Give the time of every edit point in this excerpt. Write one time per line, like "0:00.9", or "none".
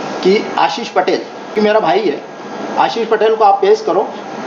0:01.6